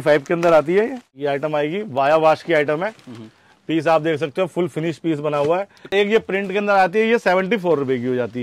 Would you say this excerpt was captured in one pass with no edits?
no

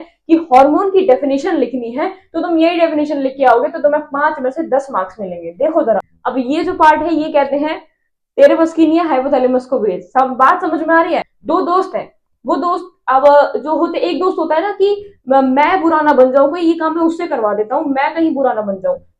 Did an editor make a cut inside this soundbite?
yes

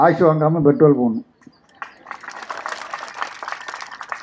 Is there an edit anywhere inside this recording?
no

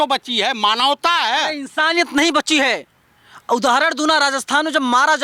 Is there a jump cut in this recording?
no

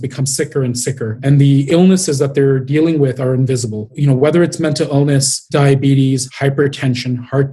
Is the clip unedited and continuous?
yes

